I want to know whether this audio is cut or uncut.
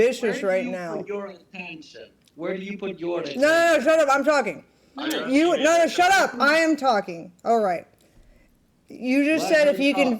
uncut